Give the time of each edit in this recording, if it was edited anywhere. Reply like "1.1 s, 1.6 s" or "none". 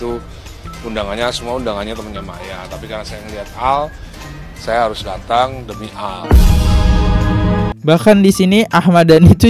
7.7 s